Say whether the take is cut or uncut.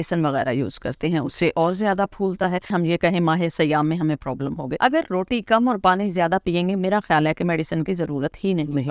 cut